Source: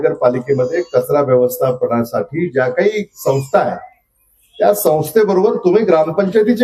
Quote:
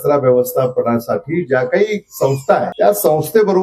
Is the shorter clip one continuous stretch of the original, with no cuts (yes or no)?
no